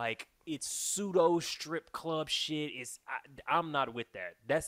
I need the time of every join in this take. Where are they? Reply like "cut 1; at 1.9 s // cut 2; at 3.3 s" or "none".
none